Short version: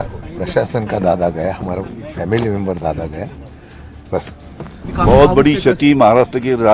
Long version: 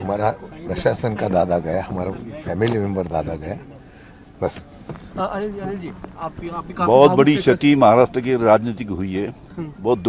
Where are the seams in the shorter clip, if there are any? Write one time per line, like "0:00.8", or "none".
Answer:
0:04.8